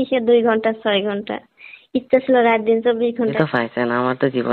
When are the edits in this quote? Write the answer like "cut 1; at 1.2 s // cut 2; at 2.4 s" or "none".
cut 1; at 3.3 s